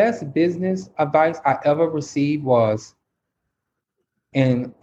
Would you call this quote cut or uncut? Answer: uncut